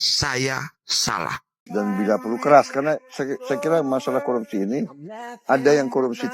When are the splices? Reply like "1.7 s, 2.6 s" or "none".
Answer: 1.6 s

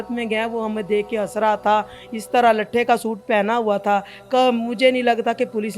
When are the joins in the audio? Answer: none

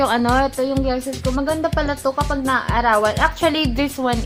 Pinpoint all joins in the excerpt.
none

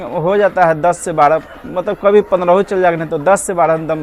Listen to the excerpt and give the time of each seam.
none

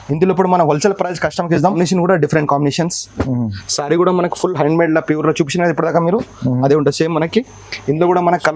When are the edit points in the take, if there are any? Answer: 1.7 s

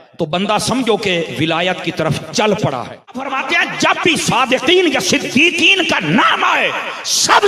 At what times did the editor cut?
3.4 s

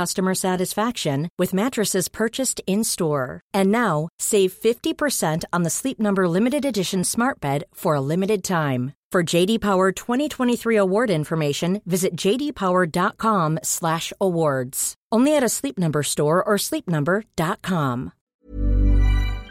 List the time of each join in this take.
18.2 s

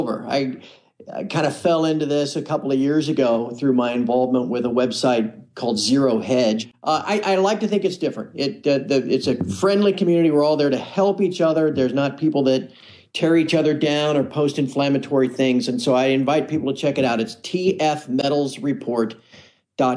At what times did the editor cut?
18.0 s

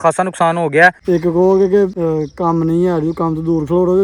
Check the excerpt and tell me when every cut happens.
1.0 s, 1.9 s

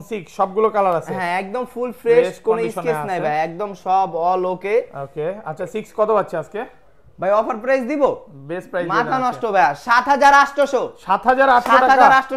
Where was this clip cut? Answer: none

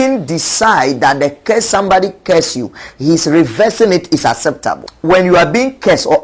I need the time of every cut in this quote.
4.9 s

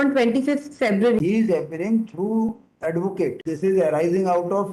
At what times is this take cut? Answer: 0.8 s, 3.4 s

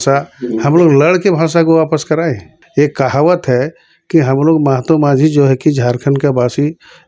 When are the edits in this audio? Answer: 2.5 s

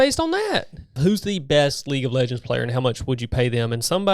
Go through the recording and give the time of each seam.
1.0 s

